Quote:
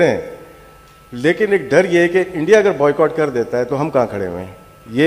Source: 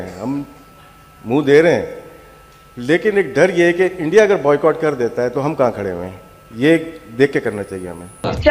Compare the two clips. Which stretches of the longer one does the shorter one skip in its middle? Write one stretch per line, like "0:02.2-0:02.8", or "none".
none